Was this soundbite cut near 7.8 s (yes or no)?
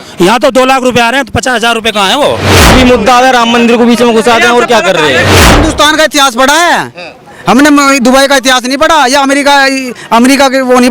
no